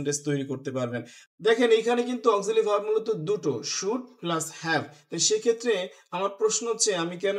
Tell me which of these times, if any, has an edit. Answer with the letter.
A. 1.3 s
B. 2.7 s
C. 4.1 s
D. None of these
A